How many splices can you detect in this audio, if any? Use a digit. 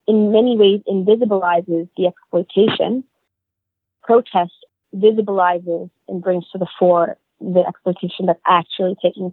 2